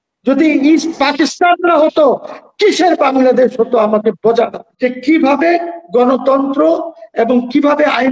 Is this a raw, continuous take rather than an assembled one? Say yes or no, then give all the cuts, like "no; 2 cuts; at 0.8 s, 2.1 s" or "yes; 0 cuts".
no; 1 cut; at 4.6 s